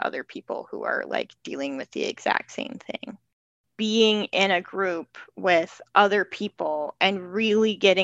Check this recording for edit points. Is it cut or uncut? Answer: cut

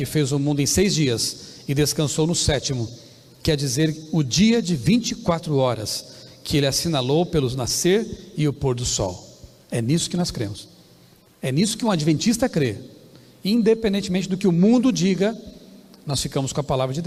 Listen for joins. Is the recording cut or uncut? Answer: uncut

